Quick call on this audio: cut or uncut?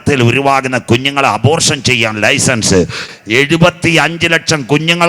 cut